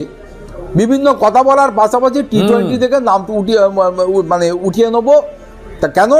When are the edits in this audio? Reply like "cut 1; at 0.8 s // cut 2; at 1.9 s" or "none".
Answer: none